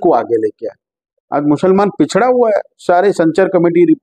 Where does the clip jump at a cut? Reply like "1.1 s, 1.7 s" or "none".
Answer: none